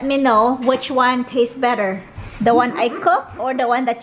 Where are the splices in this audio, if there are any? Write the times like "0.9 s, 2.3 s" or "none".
none